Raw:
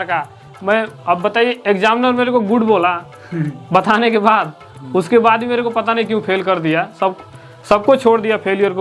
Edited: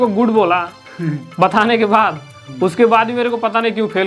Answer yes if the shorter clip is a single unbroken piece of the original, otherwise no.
yes